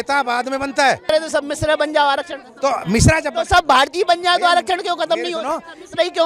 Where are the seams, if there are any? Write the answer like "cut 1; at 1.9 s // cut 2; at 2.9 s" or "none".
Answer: cut 1; at 1.1 s